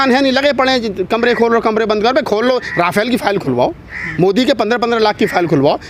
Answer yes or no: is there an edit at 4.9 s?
no